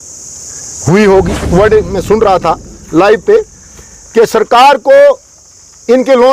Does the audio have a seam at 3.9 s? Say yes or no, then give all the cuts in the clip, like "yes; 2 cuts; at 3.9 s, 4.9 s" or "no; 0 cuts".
no; 1 cut; at 1.5 s